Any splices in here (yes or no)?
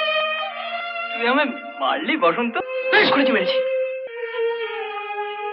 no